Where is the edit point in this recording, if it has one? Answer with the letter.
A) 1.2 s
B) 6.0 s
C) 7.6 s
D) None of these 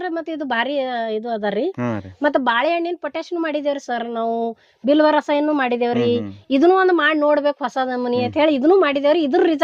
D